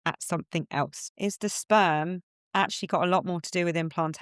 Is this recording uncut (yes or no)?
no